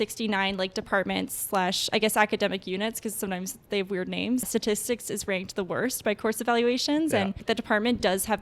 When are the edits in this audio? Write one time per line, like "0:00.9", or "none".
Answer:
0:04.5
0:07.4